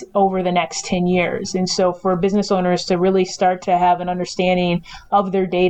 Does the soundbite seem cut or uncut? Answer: uncut